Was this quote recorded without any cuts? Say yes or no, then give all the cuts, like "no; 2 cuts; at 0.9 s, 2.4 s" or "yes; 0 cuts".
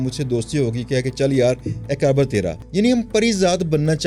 no; 1 cut; at 2.6 s